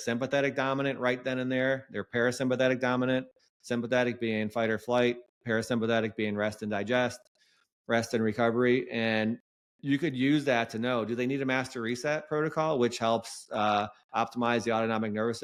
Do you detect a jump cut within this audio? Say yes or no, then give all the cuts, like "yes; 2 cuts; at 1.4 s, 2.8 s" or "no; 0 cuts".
no; 0 cuts